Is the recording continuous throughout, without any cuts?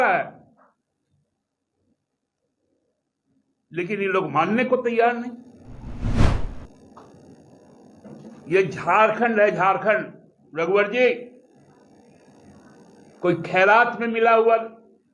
yes; 0 cuts

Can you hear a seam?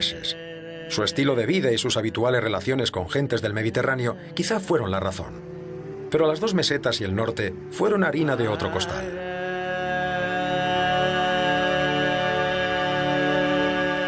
yes; 1 cut; at 1.7 s

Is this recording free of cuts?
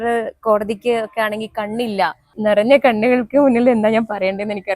no; 1 cut; at 2.3 s

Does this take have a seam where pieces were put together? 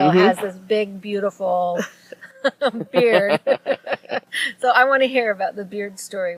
no; 0 cuts

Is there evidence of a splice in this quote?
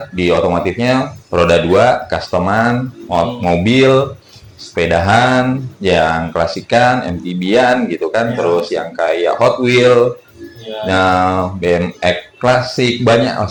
no; 0 cuts

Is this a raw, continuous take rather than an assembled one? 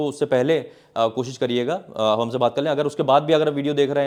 yes; 0 cuts

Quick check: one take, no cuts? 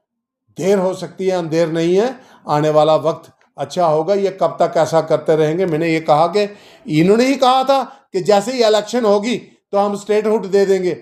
yes; 0 cuts

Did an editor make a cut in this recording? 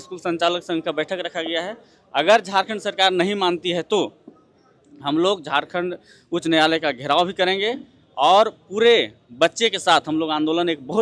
no; 0 cuts

